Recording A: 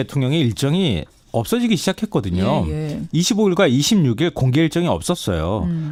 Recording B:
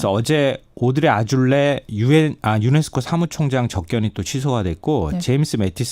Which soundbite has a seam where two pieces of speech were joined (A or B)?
B